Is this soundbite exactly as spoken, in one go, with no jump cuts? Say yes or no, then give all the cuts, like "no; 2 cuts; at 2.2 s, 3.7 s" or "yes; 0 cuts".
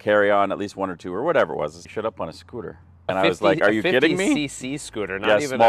no; 2 cuts; at 1.8 s, 3.1 s